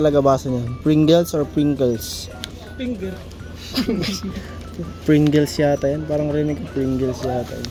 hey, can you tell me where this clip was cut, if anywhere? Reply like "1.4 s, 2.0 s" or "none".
none